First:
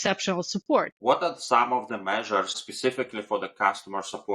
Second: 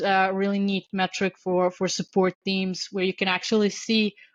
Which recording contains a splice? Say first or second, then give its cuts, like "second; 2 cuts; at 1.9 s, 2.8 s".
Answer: first; 2 cuts; at 0.9 s, 2.6 s